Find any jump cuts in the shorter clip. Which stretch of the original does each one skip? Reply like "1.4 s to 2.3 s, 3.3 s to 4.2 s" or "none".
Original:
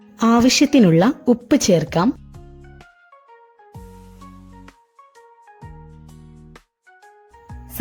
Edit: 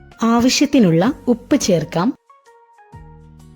2.2 s to 4.9 s